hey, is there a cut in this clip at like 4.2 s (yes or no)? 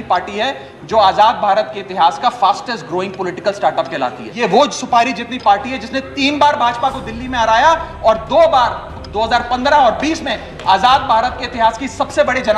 yes